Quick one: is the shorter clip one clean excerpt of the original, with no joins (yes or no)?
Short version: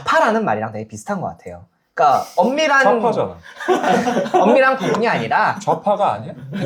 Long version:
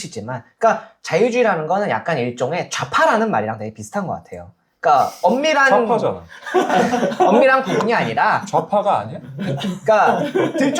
yes